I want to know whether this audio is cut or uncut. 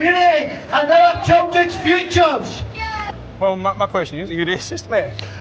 cut